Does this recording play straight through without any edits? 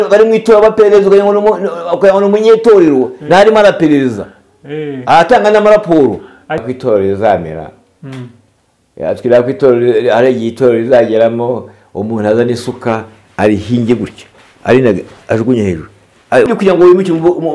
no; 2 cuts; at 6.7 s, 16.5 s

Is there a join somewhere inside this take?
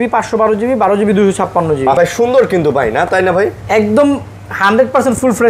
yes; 1 cut; at 2.0 s

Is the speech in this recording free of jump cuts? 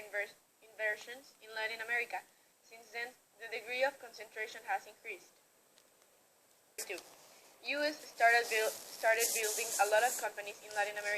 no; 1 cut; at 6.8 s

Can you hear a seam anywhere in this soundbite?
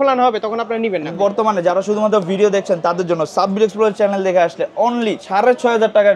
yes; 2 cuts; at 1.2 s, 5.2 s

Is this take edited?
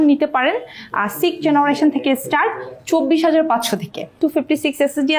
yes; 1 cut; at 4.1 s

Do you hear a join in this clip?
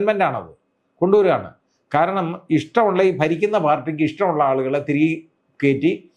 no; 0 cuts

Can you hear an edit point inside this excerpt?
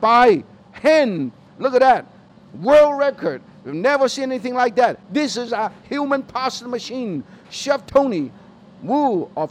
no; 0 cuts

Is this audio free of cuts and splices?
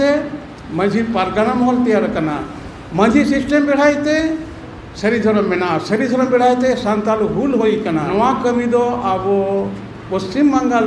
no; 1 cut; at 8.1 s

